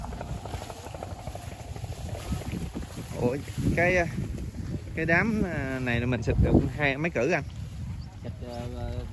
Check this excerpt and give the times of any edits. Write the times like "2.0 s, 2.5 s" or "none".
none